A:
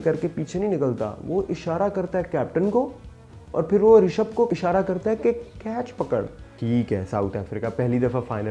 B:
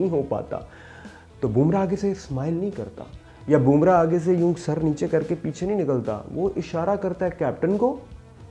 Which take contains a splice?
A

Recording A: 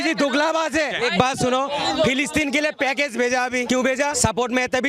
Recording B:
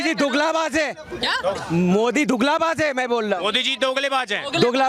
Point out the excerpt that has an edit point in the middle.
A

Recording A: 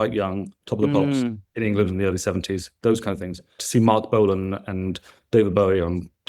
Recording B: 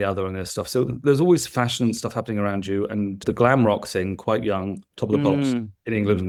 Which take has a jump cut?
A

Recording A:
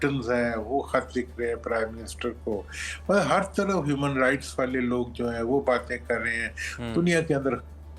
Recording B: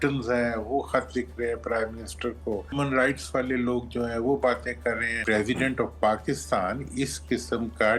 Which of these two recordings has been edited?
B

